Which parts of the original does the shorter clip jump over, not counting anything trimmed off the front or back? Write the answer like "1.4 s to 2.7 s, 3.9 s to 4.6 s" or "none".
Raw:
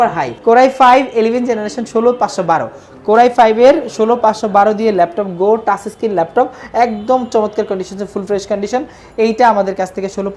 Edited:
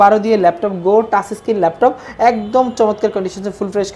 none